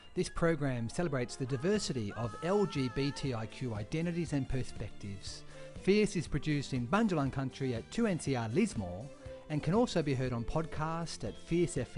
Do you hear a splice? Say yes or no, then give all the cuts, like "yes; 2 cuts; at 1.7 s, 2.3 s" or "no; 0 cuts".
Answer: no; 0 cuts